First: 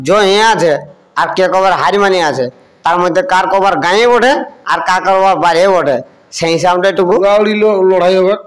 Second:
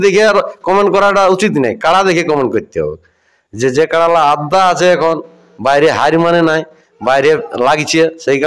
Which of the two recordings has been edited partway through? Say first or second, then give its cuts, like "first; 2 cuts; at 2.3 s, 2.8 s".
first; 1 cut; at 7.2 s